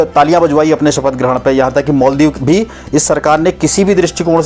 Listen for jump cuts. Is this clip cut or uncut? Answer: cut